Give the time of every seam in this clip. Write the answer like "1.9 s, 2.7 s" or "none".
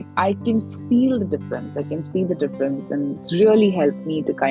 3.2 s